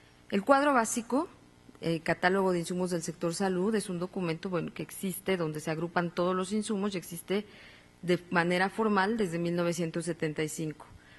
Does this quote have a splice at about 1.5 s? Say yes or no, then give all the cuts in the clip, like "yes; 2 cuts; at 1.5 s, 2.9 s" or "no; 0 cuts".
no; 1 cut; at 8.2 s